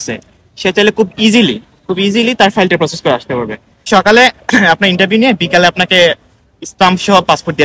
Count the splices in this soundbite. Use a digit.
1